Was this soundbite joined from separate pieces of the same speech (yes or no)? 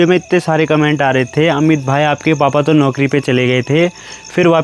no